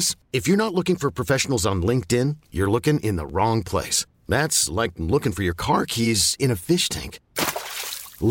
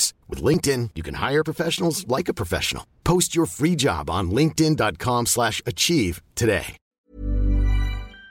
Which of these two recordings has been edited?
second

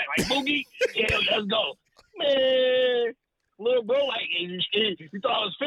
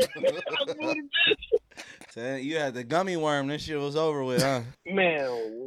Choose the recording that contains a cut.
second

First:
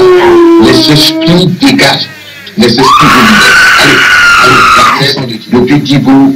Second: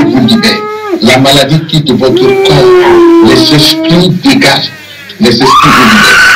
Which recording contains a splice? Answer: first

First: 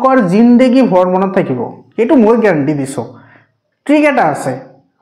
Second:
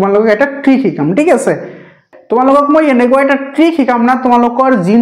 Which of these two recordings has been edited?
second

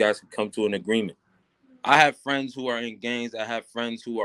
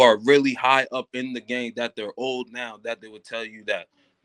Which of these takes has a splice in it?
first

